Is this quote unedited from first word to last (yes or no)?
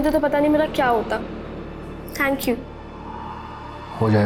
yes